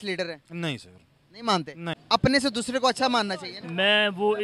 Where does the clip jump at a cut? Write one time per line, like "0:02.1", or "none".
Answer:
0:02.0